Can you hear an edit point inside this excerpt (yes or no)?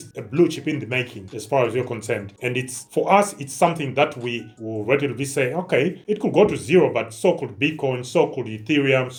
no